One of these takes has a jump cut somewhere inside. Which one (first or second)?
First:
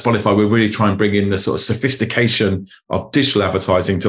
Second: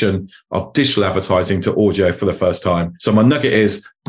second